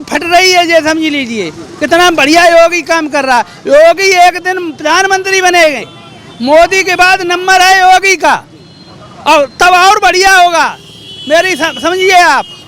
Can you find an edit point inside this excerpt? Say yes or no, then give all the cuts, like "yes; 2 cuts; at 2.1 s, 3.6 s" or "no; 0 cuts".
no; 0 cuts